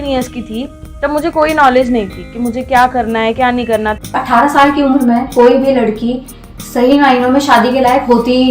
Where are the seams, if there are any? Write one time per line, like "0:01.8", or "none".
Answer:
0:04.1